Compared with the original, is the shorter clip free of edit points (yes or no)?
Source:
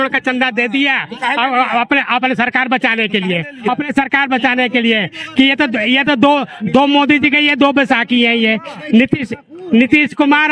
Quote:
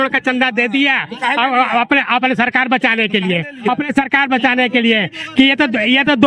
yes